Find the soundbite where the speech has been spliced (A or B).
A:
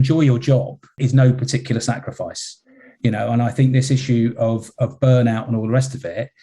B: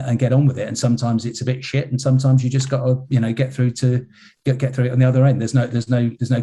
A